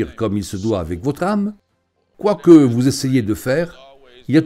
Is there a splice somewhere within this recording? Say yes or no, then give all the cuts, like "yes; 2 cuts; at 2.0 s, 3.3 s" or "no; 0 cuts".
no; 0 cuts